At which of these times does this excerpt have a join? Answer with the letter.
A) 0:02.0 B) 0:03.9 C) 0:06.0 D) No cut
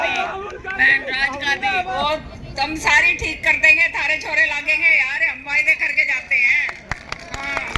A